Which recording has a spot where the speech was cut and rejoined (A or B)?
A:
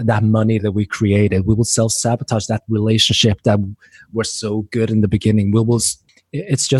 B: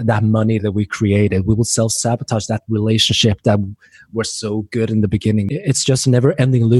B